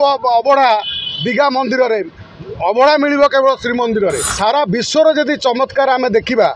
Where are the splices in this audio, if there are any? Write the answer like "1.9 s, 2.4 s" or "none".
4.3 s

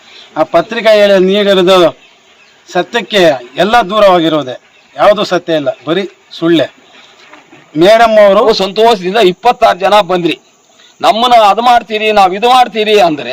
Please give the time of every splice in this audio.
8.4 s

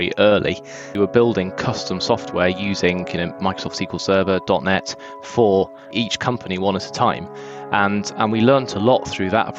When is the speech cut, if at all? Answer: 0.9 s, 5.8 s

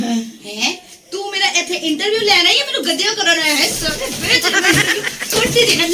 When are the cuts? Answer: none

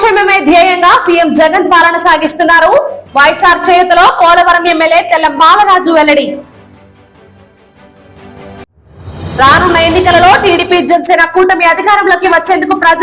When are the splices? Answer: none

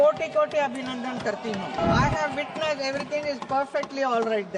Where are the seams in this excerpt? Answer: 1.8 s

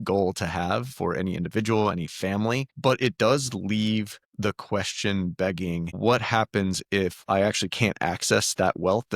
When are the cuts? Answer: 2.7 s, 4.2 s, 5.9 s

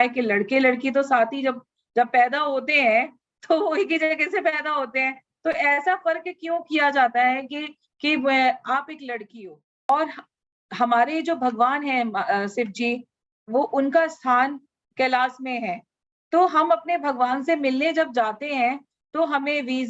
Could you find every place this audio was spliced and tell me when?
9.9 s

